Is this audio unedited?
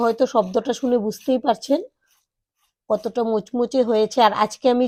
yes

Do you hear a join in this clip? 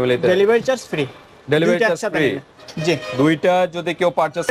no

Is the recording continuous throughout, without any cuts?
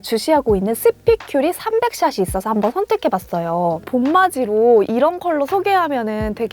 no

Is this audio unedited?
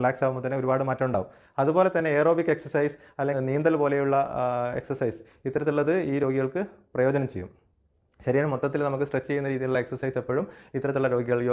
yes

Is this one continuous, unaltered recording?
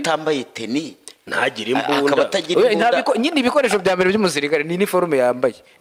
yes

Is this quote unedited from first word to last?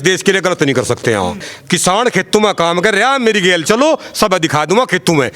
no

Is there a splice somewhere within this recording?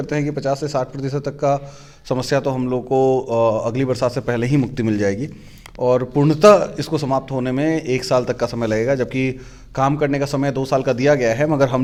no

